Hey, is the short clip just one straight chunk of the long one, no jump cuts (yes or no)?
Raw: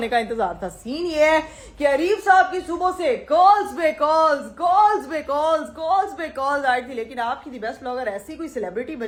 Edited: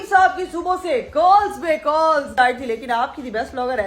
no